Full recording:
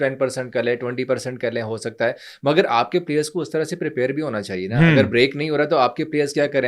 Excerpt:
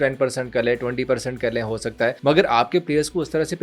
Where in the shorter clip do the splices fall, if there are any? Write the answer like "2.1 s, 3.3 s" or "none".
2.2 s

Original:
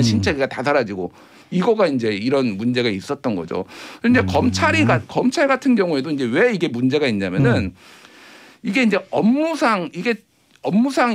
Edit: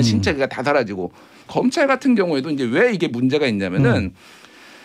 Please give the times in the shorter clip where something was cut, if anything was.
1.4 s

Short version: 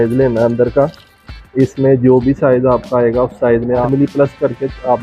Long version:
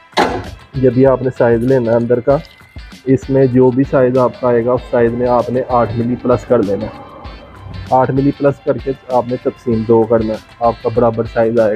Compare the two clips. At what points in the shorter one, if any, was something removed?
3.8 s

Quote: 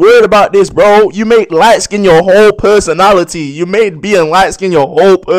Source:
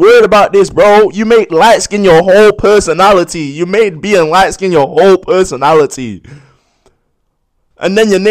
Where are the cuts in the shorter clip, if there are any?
none

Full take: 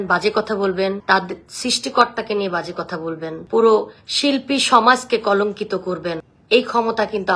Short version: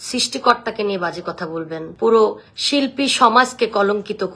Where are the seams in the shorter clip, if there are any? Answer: none

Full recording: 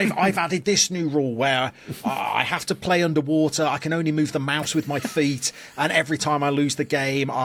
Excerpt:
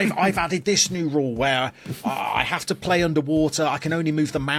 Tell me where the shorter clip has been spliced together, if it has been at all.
none

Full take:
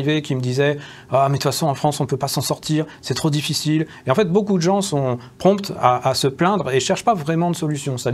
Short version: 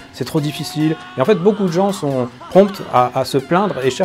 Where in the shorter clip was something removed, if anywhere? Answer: none

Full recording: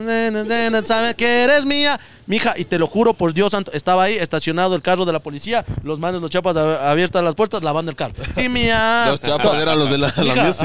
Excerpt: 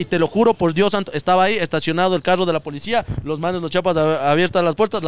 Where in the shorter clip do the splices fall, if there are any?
none

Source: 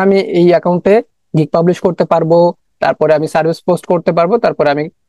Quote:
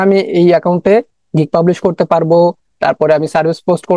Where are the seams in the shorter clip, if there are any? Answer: none

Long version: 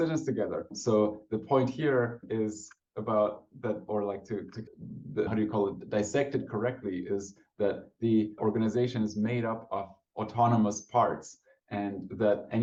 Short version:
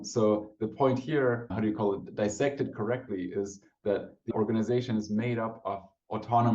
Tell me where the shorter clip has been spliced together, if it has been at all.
1.5 s, 4.3 s

